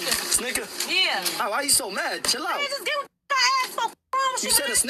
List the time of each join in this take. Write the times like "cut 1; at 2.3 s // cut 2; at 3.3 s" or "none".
cut 1; at 1.0 s